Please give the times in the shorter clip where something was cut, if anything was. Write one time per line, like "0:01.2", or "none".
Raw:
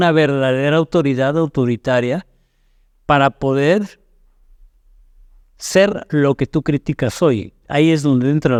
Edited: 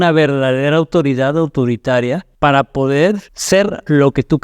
0:02.3
0:03.3